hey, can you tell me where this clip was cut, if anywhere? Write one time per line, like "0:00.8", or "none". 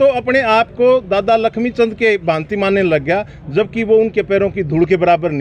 none